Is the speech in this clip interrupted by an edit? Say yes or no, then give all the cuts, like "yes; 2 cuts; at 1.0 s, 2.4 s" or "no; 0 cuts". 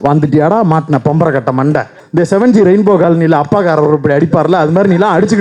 yes; 1 cut; at 2.0 s